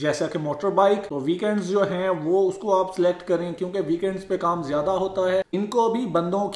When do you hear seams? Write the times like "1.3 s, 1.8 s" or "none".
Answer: 1.1 s, 5.5 s